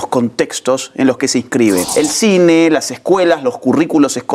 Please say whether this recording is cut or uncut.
cut